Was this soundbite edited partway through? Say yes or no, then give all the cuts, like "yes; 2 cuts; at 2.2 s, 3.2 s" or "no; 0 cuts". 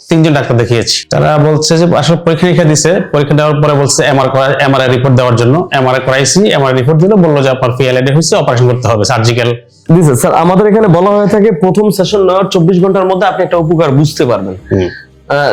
yes; 2 cuts; at 1.0 s, 9.7 s